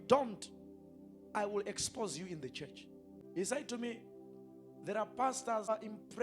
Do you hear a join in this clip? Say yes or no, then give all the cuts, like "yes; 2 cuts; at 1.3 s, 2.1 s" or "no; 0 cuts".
yes; 1 cut; at 3.2 s